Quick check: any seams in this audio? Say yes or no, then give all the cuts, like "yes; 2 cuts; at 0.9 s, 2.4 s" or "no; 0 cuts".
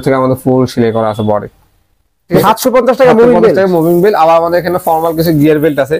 yes; 1 cut; at 2.3 s